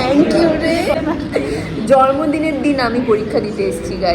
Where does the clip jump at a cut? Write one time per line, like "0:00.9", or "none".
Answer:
0:00.9

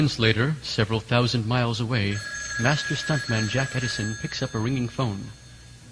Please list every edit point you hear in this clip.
0:03.5

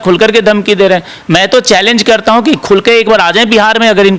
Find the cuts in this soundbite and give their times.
none

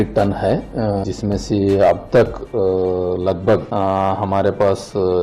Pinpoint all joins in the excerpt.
0:01.0
0:03.7

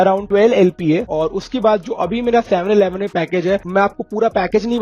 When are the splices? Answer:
0:01.0

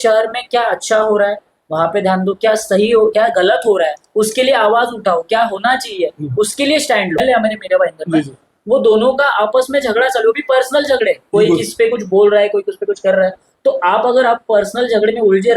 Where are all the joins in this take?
0:07.2

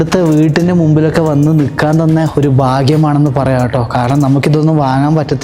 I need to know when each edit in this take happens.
none

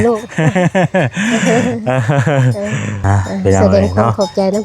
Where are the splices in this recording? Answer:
0:02.9

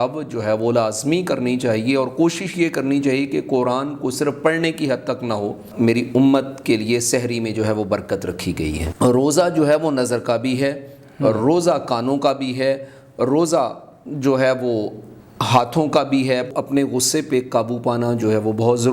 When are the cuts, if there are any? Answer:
0:05.6
0:08.8
0:16.5

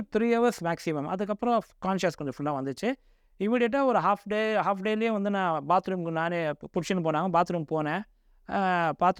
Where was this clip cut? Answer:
none

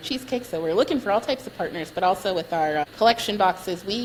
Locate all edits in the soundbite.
none

